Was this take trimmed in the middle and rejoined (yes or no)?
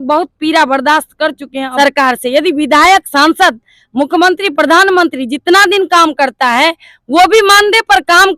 yes